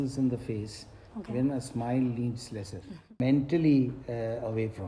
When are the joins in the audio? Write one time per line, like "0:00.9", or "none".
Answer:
0:03.2